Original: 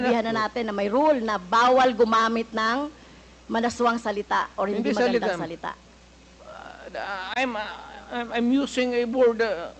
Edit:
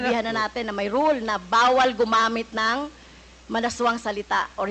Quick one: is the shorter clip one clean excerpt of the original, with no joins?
yes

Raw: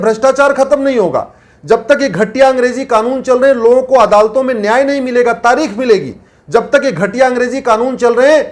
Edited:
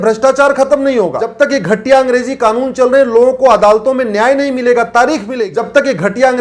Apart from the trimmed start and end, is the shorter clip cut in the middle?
yes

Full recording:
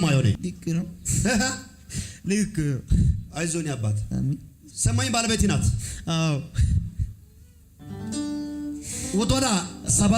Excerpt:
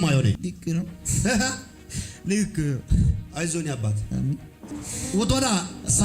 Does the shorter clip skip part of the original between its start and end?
yes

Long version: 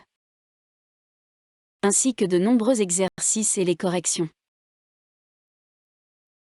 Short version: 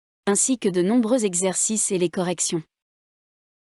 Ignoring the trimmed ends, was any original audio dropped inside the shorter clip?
yes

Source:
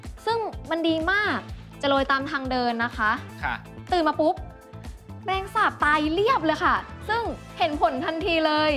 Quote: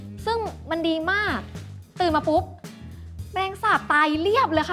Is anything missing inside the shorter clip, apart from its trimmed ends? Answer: yes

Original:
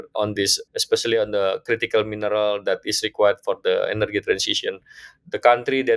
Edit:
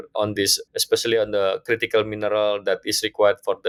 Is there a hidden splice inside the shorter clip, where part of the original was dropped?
no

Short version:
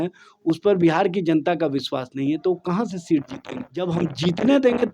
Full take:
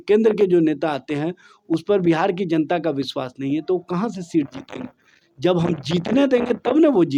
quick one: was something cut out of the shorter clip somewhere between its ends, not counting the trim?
yes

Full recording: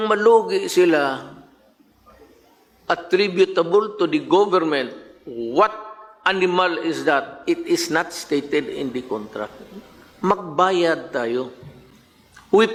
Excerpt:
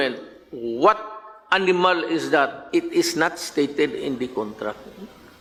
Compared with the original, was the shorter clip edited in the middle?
no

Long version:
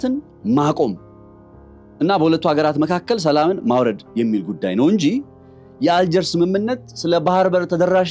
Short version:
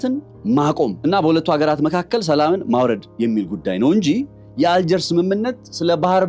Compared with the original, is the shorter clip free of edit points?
no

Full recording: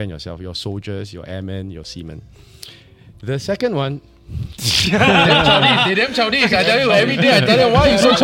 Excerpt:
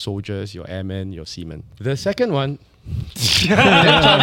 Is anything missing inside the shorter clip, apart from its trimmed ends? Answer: yes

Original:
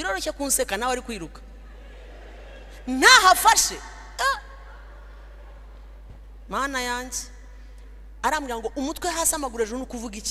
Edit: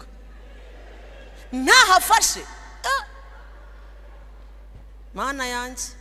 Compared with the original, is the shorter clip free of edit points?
yes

